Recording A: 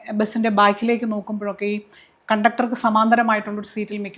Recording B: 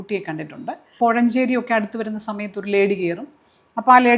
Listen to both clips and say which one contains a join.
B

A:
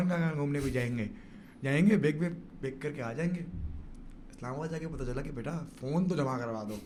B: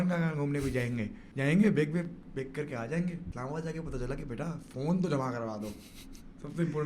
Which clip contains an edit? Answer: B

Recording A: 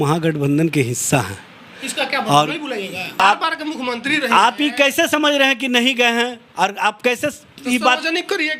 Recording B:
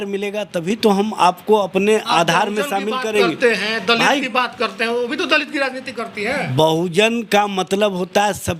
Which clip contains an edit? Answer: A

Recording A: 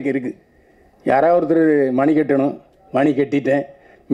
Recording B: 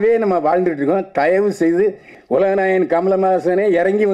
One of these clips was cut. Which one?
B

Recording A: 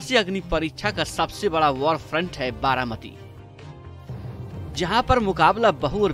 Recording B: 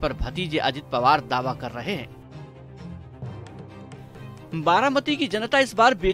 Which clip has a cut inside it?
B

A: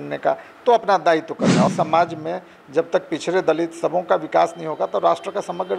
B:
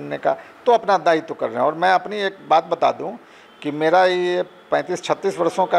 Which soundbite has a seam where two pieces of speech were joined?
A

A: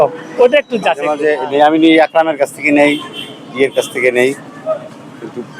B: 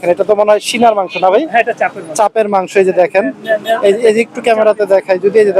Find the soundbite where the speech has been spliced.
A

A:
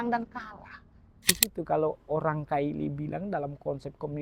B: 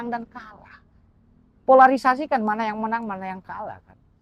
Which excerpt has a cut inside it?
A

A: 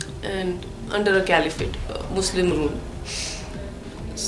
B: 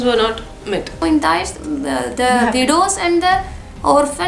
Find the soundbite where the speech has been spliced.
B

